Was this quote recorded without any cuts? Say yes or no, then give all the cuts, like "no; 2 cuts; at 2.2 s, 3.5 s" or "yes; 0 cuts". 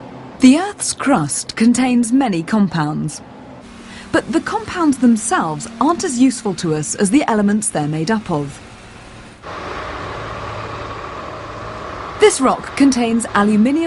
yes; 0 cuts